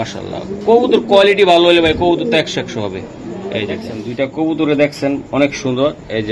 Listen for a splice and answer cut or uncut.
cut